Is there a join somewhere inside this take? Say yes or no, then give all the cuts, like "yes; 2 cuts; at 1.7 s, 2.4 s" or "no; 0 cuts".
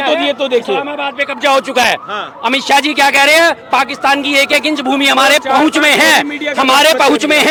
no; 0 cuts